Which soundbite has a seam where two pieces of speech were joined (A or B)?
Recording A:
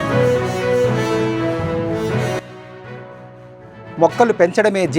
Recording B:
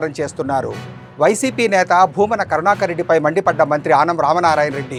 A